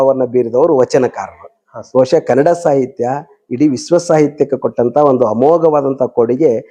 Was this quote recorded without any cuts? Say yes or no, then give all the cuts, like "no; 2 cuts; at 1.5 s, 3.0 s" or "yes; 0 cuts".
yes; 0 cuts